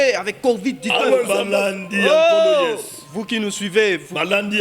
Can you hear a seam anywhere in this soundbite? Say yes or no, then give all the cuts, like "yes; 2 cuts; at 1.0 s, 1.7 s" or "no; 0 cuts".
yes; 1 cut; at 1.4 s